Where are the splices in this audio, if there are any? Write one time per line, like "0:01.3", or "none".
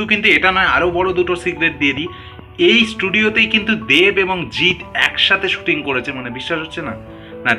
none